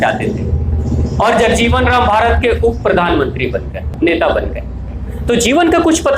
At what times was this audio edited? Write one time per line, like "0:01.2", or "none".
0:03.9